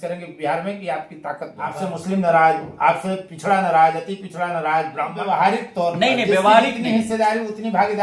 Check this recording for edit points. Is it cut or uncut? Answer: cut